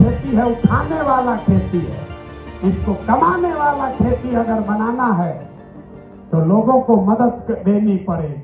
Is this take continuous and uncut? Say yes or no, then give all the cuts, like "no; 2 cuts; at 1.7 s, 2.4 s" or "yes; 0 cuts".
yes; 0 cuts